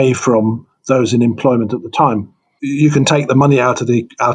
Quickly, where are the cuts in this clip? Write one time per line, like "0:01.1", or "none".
none